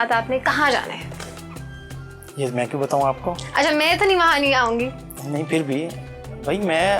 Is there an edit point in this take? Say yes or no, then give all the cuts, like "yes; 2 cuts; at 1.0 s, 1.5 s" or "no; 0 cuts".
no; 0 cuts